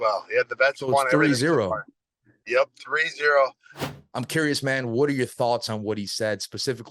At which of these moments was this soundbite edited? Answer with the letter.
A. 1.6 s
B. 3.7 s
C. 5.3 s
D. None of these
B